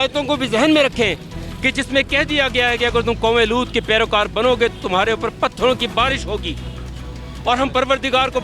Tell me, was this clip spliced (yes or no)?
no